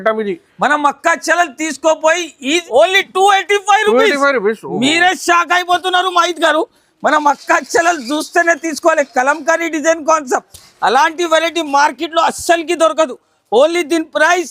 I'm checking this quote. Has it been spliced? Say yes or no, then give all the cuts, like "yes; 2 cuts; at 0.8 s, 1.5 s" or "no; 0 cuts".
yes; 1 cut; at 2.6 s